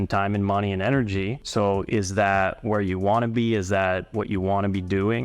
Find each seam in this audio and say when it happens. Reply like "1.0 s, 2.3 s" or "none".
1.4 s